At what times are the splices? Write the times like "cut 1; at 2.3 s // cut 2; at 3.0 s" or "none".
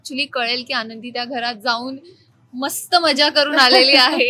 none